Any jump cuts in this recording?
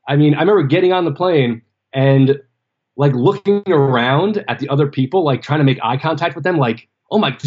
yes; 1 cut; at 3.9 s

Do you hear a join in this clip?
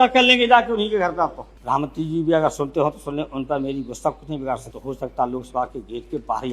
yes; 2 cuts; at 1.5 s, 4.7 s

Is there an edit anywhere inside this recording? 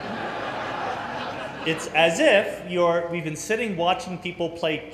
no; 0 cuts

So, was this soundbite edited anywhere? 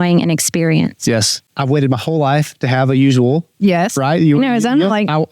yes; 1 cut; at 1.5 s

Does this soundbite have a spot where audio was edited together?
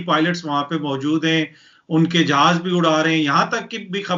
no; 0 cuts

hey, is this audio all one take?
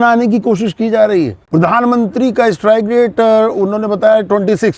no; 1 cut; at 1.4 s

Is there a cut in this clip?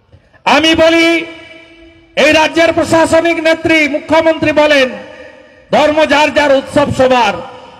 no; 0 cuts

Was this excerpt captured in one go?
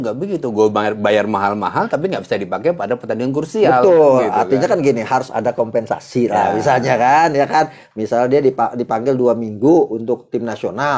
yes; 0 cuts

